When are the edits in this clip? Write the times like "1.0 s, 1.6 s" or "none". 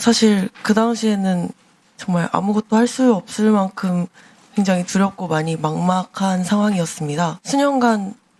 7.4 s